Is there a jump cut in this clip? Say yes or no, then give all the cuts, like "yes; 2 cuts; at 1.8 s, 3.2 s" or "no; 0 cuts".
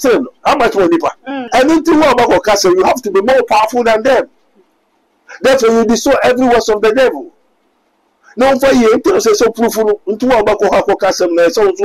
yes; 1 cut; at 1.4 s